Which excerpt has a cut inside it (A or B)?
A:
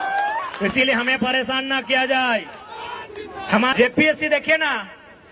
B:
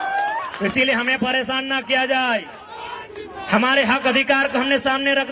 A